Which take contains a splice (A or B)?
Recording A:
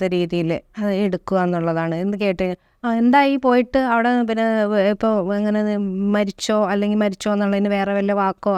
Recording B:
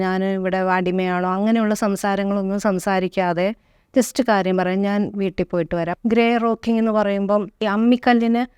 B